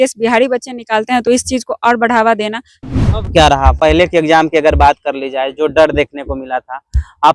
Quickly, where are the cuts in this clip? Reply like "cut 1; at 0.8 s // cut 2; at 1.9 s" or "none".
cut 1; at 2.7 s